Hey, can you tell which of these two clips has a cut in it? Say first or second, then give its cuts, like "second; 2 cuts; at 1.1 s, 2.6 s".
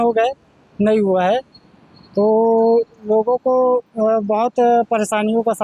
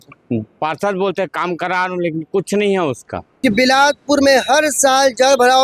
second; 1 cut; at 3.3 s